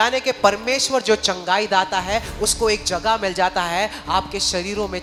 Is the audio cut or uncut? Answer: uncut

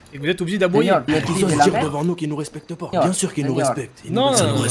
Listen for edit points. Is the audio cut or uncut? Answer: cut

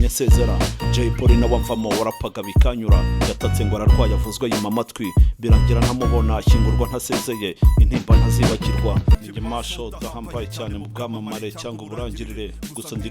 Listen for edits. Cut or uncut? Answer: cut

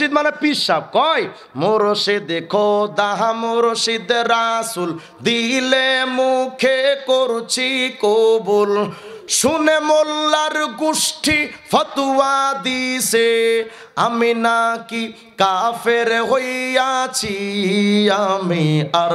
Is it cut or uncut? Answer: uncut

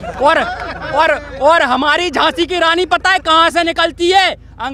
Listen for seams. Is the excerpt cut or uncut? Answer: uncut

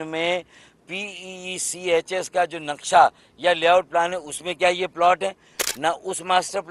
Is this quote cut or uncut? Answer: uncut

